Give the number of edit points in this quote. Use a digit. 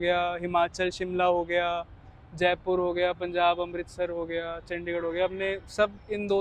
0